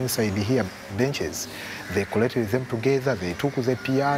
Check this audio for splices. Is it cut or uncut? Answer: cut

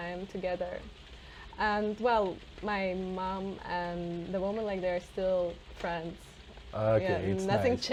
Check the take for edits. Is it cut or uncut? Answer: uncut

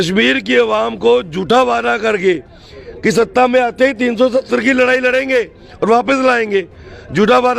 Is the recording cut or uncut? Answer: uncut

